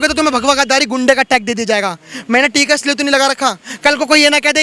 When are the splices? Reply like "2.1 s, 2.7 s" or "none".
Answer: none